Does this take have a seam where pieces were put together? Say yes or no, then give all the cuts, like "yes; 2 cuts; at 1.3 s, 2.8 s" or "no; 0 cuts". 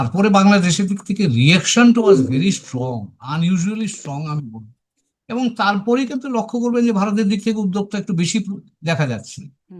no; 0 cuts